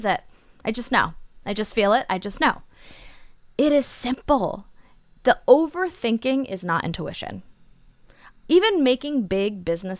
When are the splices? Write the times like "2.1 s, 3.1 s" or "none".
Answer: none